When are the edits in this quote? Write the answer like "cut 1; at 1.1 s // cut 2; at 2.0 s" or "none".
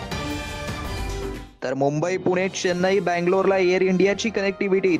none